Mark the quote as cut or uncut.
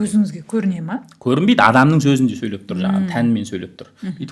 uncut